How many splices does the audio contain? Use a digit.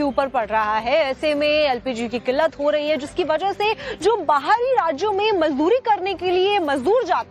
1